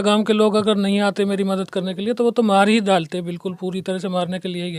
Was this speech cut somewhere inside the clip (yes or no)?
no